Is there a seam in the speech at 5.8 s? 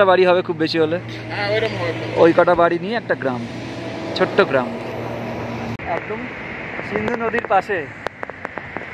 yes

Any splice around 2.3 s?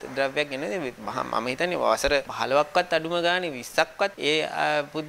yes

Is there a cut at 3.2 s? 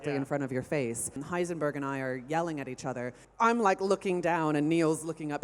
yes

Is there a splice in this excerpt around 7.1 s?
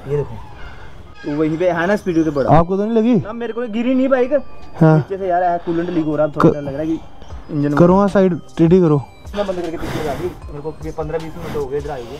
no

